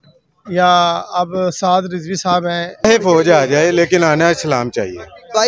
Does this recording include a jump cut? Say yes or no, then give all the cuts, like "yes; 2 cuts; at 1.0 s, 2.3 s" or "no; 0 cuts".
yes; 1 cut; at 2.8 s